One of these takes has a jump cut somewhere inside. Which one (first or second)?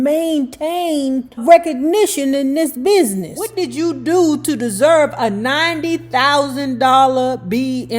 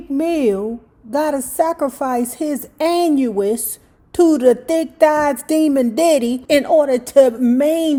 first